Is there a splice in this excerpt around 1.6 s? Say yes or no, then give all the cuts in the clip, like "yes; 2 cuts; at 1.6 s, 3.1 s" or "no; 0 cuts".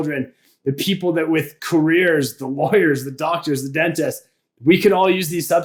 yes; 1 cut; at 1.6 s